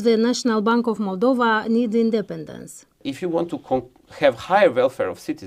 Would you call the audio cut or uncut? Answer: cut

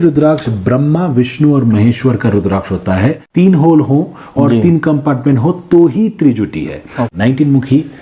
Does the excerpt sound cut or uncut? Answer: cut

